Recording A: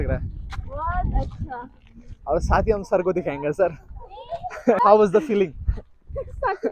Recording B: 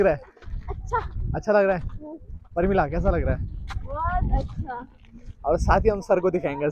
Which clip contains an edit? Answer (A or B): A